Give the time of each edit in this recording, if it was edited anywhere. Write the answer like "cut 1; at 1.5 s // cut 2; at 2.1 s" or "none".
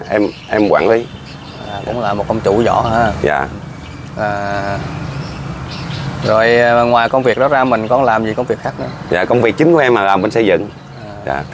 none